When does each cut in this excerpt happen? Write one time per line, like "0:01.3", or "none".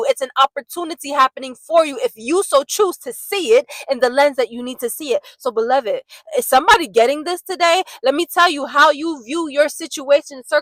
none